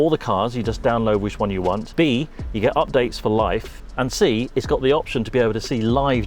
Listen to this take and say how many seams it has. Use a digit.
0